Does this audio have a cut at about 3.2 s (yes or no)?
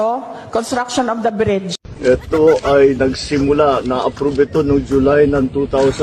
no